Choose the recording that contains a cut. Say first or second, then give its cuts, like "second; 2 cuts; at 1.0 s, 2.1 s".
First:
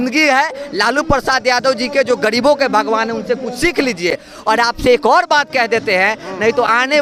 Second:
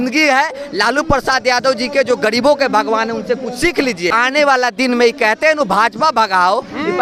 second; 1 cut; at 4.1 s